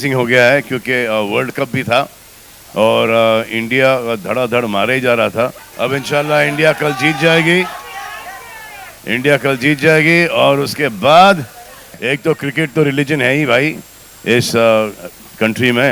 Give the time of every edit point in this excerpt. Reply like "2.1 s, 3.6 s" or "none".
5.6 s, 11.9 s